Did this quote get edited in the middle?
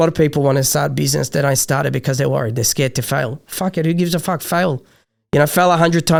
no; 0 cuts

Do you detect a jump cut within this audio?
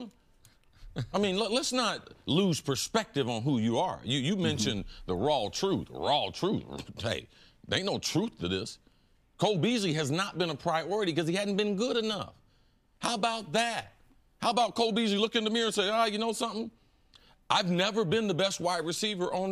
no; 0 cuts

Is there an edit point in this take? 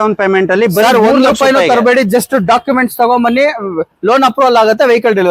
no; 0 cuts

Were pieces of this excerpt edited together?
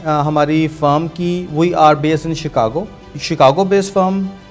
yes; 1 cut; at 3.0 s

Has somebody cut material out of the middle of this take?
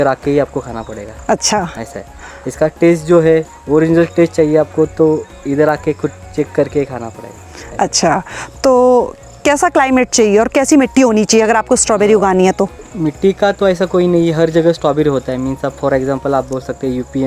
no; 0 cuts

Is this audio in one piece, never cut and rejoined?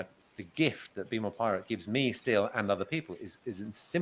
yes; 0 cuts

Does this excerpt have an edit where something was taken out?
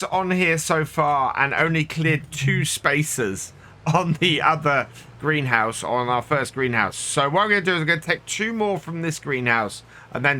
no; 0 cuts

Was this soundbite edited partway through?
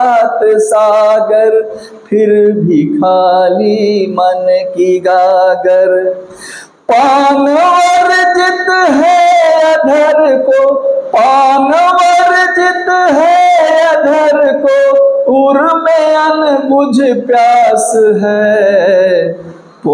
no; 0 cuts

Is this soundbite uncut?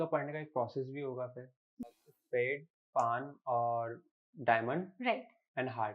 no; 1 cut; at 2.0 s

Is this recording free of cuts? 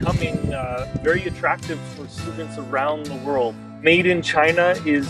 no; 1 cut; at 3.7 s

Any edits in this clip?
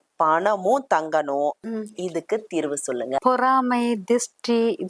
yes; 2 cuts; at 1.7 s, 3.2 s

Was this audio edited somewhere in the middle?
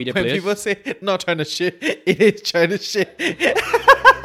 no; 0 cuts

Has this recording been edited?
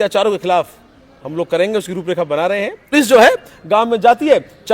yes; 1 cut; at 2.9 s

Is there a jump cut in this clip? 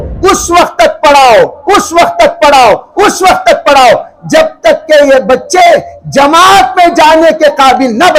no; 0 cuts

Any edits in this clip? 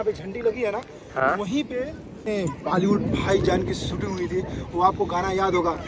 yes; 1 cut; at 2.3 s

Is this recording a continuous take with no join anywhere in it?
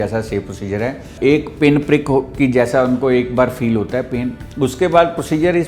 no; 2 cuts; at 1.1 s, 4.4 s

